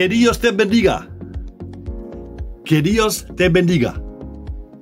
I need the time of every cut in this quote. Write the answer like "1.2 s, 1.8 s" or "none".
1.2 s, 2.6 s, 3.9 s